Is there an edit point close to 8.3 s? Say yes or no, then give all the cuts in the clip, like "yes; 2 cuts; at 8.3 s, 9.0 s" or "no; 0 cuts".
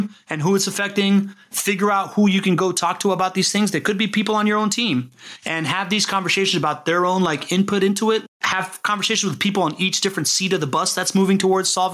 yes; 1 cut; at 8.3 s